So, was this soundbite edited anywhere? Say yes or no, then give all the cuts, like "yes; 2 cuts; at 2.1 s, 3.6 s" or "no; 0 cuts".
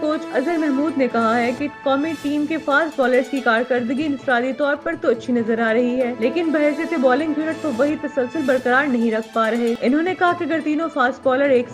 no; 0 cuts